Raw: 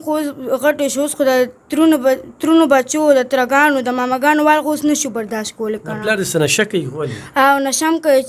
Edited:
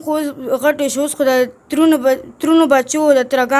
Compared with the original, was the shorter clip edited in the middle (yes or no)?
no